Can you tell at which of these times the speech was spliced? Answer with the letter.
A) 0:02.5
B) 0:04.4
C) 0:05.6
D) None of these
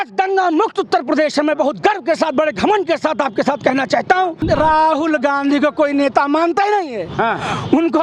B